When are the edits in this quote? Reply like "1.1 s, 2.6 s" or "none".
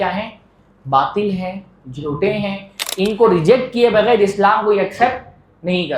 2.8 s